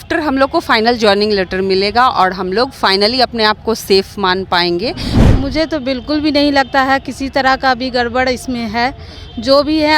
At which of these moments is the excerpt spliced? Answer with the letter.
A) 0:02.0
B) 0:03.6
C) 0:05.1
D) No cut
C